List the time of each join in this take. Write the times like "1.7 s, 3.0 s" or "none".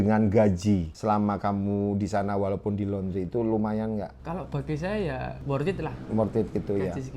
0.9 s, 4.2 s, 5.4 s